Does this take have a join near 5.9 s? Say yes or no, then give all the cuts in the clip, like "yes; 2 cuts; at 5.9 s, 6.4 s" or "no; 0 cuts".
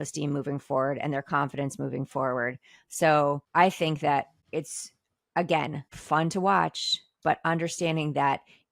yes; 3 cuts; at 3.4 s, 4.4 s, 5.9 s